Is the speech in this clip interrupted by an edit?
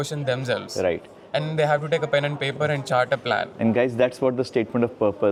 no; 0 cuts

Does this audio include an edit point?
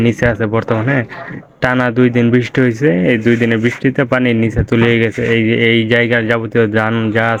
no; 0 cuts

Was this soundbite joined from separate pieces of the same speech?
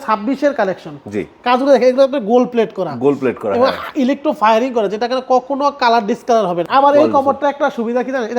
yes; 1 cut; at 6.6 s

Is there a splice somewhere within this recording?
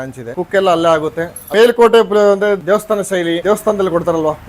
yes; 1 cut; at 1.4 s

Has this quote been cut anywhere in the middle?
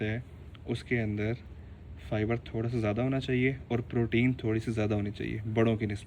no; 0 cuts

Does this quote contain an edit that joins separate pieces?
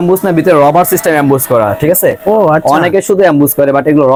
no; 0 cuts

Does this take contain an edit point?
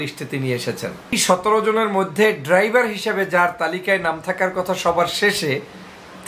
yes; 1 cut; at 1.1 s

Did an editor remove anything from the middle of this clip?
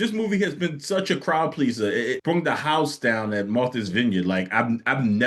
no; 0 cuts

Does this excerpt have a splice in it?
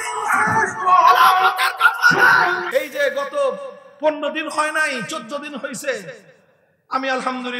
yes; 1 cut; at 2.6 s

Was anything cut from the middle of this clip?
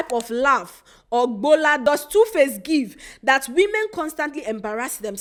no; 0 cuts

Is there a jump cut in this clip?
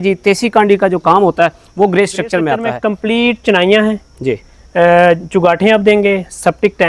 yes; 1 cut; at 2.7 s

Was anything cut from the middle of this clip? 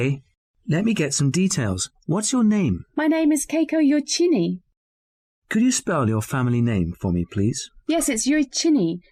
no; 0 cuts

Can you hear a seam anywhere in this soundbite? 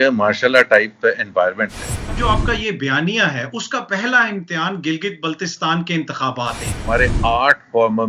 yes; 2 cuts; at 2.1 s, 6.8 s

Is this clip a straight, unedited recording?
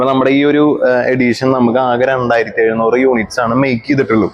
yes; 0 cuts

